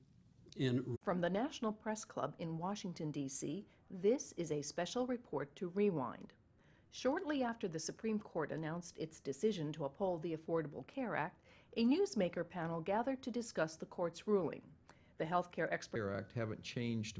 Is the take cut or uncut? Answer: uncut